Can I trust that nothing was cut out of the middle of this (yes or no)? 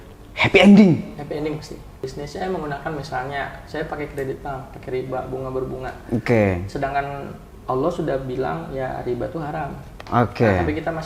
no